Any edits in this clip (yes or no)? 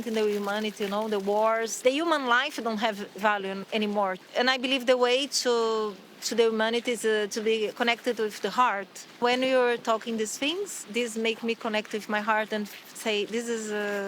yes